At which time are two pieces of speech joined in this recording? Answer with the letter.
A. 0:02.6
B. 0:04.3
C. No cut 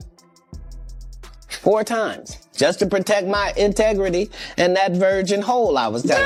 C